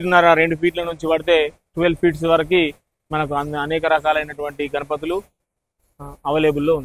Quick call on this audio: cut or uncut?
uncut